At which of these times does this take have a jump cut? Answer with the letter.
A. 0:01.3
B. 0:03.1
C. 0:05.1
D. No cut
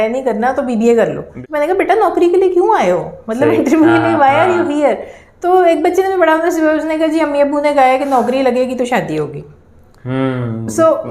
A